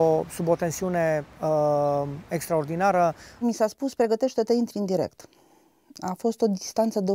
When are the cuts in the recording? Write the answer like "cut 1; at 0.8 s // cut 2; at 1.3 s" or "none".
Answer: cut 1; at 3.3 s